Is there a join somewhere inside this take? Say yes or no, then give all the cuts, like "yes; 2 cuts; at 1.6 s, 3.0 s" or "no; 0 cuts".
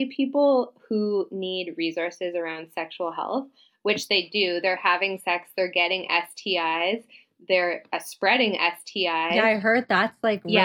no; 0 cuts